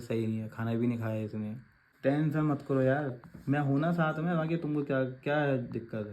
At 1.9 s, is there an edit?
yes; 1 cut; at 1.9 s

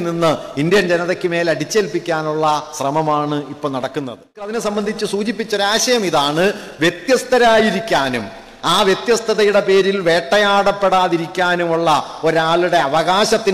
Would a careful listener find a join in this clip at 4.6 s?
yes; 1 cut; at 4.6 s

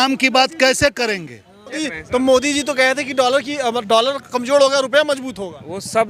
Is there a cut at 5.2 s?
no; 1 cut; at 1.9 s

